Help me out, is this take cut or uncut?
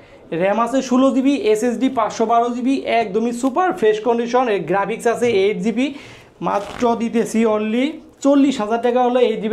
uncut